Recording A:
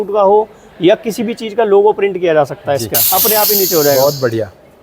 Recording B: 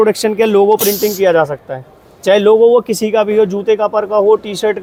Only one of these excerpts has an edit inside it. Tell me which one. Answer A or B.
A